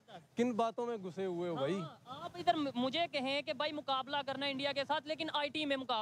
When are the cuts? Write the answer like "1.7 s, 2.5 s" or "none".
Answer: none

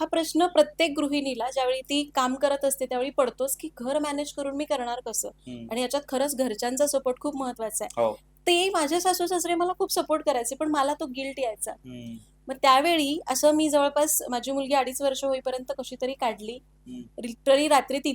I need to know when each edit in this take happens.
none

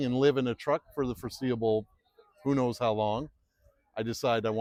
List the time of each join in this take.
none

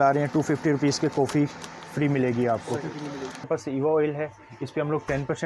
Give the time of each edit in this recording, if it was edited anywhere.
3.4 s

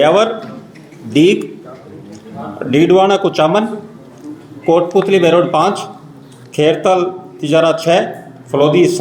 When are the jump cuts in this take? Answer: none

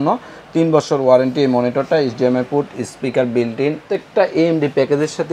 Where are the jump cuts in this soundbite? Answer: 3.9 s

